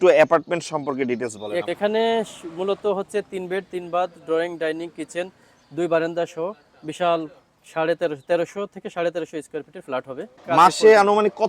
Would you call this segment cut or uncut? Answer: cut